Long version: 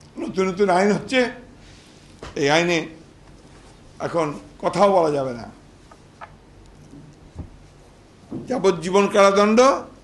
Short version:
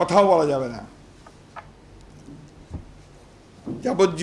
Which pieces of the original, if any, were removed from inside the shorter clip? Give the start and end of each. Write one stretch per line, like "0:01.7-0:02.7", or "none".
none